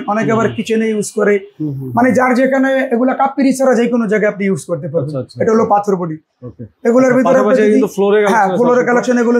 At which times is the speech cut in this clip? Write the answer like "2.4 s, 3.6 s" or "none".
none